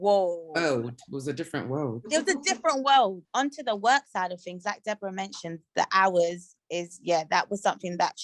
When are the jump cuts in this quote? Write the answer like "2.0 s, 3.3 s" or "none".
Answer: none